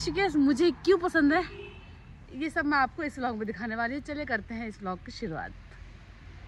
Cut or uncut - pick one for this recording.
uncut